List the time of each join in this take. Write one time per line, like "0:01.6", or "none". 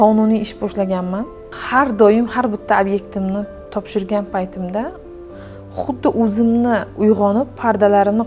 0:01.4